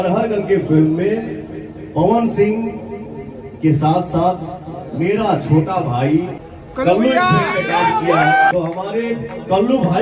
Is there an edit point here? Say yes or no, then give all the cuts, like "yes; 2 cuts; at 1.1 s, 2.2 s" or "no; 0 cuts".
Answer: yes; 2 cuts; at 6.4 s, 8.5 s